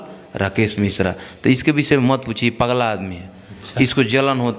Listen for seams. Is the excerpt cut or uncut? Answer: uncut